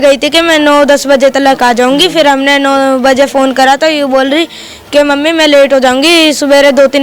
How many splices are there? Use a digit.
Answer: 0